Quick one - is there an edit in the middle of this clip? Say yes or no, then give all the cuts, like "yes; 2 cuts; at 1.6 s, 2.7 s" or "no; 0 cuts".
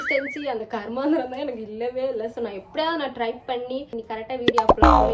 yes; 1 cut; at 4.0 s